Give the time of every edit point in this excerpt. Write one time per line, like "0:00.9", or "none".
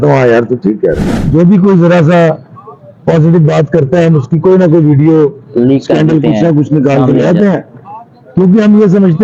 0:01.1